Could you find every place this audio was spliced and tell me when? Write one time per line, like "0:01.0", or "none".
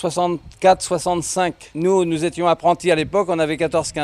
0:01.6

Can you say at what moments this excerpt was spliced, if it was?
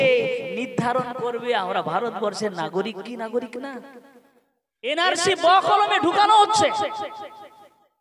0:04.9

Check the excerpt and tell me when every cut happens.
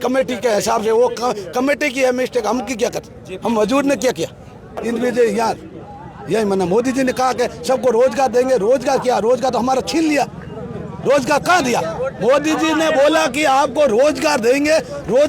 0:04.7

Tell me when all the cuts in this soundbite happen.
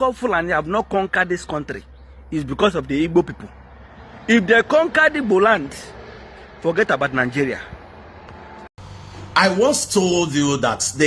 0:08.7

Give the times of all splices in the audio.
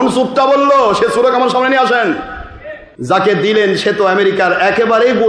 none

